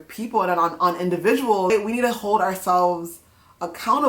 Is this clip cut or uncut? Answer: cut